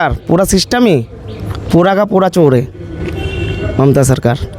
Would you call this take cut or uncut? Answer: uncut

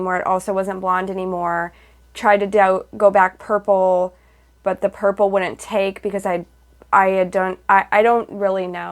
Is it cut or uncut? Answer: uncut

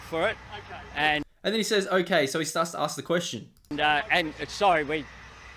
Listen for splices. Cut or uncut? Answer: uncut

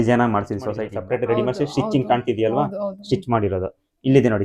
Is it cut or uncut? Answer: cut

